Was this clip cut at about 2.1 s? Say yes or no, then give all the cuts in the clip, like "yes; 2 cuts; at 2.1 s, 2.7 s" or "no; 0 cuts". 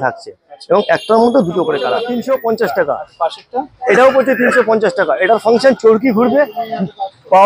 yes; 1 cut; at 2.1 s